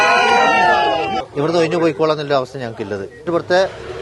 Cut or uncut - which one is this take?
cut